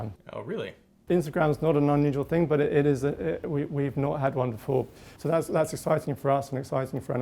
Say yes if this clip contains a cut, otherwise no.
yes